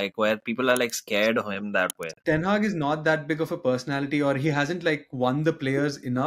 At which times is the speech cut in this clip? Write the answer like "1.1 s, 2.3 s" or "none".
2.1 s